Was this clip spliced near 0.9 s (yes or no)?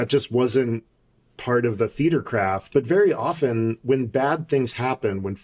no